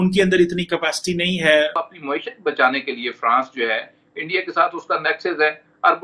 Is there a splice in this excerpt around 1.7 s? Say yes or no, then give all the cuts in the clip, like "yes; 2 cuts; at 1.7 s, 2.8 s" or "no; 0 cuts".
yes; 1 cut; at 1.7 s